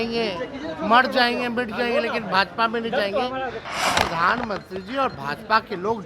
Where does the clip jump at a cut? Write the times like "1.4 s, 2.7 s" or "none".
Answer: 3.6 s